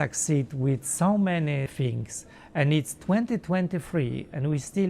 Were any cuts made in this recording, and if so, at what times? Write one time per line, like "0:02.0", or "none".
0:01.7